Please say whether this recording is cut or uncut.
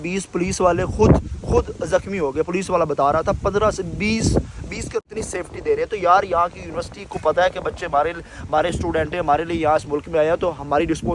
cut